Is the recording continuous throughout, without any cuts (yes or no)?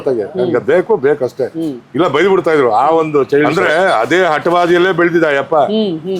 no